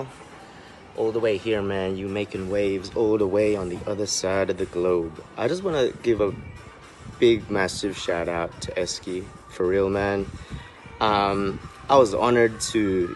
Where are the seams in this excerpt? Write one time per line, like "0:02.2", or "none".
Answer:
none